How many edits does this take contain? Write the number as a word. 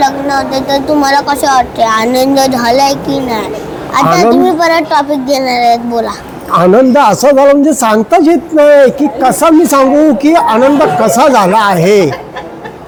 zero